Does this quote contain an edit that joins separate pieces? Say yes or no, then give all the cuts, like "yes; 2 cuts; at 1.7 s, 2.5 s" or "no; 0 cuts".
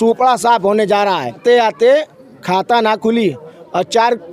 yes; 1 cut; at 1.4 s